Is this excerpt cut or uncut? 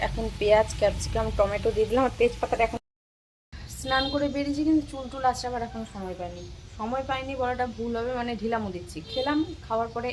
cut